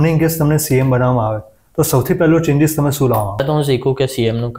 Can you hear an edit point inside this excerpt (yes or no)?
yes